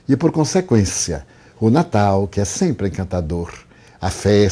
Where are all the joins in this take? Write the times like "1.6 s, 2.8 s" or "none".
3.5 s